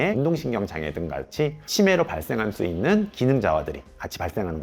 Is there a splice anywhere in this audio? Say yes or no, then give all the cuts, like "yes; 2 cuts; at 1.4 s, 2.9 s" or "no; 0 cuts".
no; 0 cuts